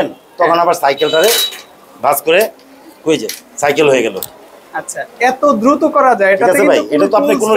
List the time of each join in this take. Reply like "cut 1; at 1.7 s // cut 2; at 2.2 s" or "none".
none